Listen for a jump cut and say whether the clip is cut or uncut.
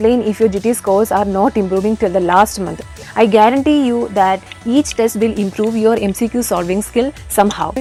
uncut